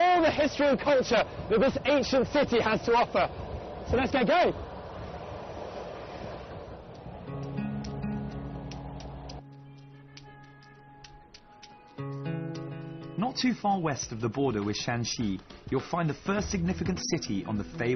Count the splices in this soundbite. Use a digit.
1